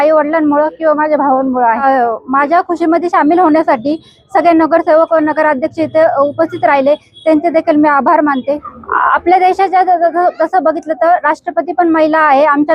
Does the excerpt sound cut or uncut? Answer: uncut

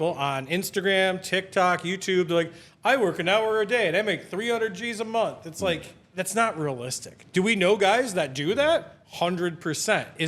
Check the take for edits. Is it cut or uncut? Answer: cut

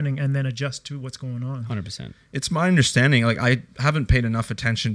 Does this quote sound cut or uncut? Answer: uncut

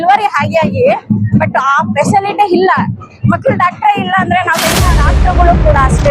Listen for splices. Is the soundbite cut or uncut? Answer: cut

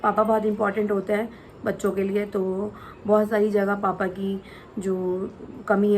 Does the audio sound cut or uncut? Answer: uncut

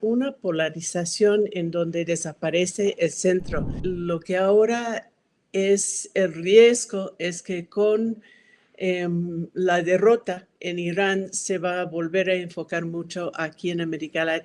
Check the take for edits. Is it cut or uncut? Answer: cut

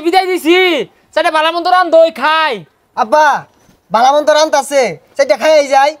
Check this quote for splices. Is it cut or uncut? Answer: uncut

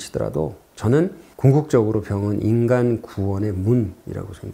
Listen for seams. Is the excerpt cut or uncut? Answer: cut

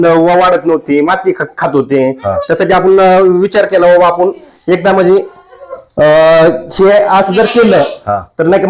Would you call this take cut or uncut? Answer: uncut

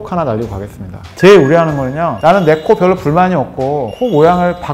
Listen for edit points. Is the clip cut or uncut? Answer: cut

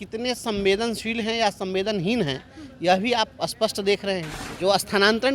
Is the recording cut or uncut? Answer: cut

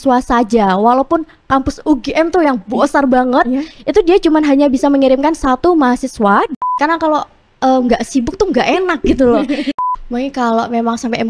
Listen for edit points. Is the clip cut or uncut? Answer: cut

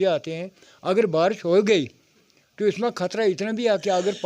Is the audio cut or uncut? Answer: uncut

